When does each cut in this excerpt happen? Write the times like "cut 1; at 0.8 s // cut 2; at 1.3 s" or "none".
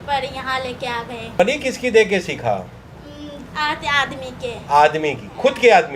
cut 1; at 1.4 s